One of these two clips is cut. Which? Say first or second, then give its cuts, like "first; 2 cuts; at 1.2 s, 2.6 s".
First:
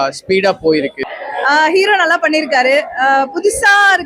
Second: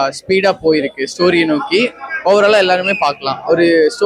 first; 1 cut; at 1.0 s